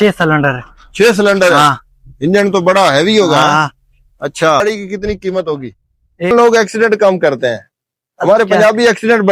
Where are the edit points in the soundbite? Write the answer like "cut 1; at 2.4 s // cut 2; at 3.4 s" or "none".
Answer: cut 1; at 4.6 s // cut 2; at 6.3 s